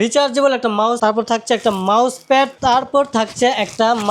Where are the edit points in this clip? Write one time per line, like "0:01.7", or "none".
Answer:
0:00.9